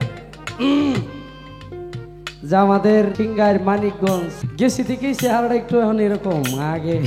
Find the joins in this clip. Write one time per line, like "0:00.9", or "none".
0:03.1
0:04.4